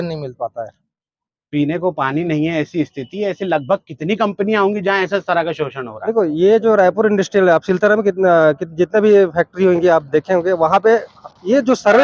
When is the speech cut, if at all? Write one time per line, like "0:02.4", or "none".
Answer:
none